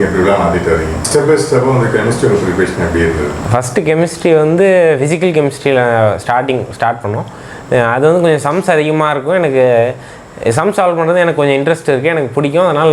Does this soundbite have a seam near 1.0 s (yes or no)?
yes